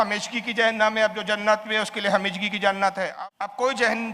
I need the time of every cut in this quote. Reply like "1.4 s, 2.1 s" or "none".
3.1 s